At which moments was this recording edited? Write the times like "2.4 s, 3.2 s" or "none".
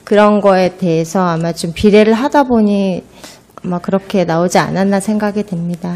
4.5 s